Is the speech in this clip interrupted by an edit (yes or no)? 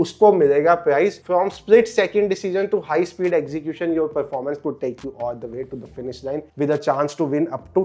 no